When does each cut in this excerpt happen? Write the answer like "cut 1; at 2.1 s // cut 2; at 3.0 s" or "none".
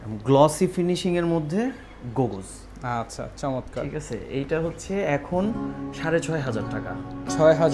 none